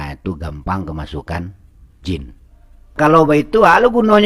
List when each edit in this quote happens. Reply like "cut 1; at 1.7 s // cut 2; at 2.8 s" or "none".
cut 1; at 3.0 s